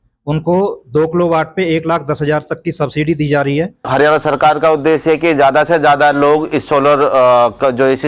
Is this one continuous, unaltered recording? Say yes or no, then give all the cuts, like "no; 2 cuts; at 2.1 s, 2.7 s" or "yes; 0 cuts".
no; 1 cut; at 3.8 s